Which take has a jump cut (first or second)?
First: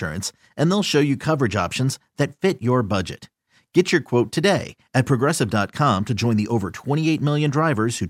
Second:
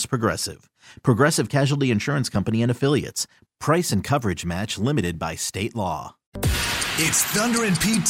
second